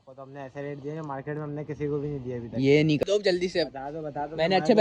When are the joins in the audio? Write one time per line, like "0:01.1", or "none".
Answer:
0:03.0